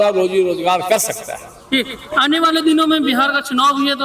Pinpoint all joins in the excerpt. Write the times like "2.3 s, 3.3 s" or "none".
none